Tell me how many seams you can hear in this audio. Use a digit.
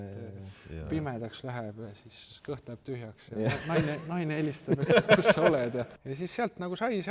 1